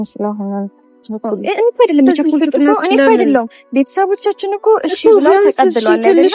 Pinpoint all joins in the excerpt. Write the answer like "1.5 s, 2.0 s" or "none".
1.1 s